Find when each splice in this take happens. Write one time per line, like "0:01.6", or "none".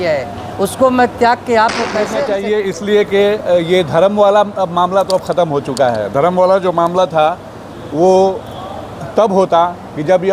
0:02.1